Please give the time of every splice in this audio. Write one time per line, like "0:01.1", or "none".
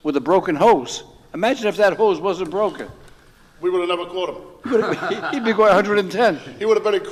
none

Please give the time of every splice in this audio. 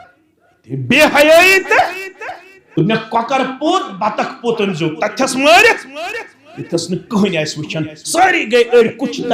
0:02.5

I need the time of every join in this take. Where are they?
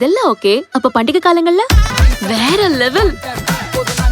0:02.0

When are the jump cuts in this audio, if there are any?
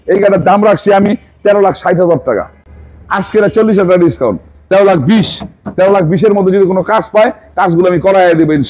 none

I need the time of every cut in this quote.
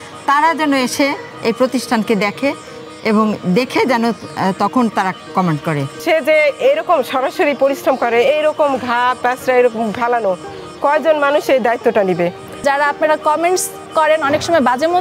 0:05.9
0:12.6

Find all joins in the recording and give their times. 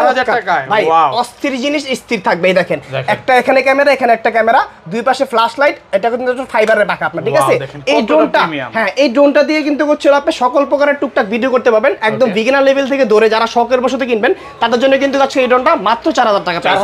none

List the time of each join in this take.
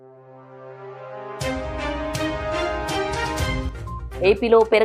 0:03.7

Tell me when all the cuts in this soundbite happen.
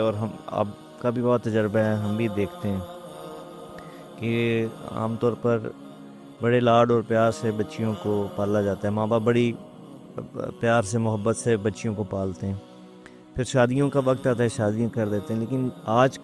0:02.8
0:04.2

